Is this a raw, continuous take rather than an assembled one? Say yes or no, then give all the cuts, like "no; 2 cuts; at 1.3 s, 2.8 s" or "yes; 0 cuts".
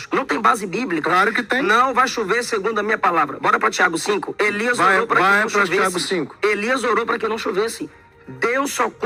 yes; 0 cuts